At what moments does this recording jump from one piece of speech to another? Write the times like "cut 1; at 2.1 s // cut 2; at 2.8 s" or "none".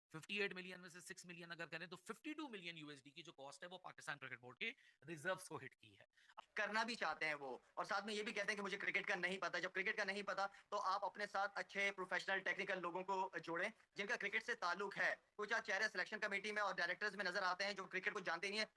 cut 1; at 6.3 s